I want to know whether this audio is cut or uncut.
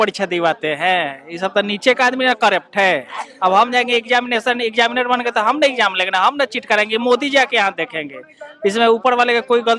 uncut